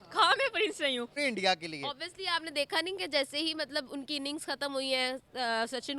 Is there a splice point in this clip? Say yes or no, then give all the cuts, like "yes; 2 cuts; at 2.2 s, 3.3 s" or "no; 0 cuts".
yes; 1 cut; at 1.2 s